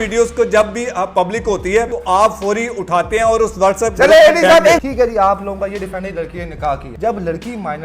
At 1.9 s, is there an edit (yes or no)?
yes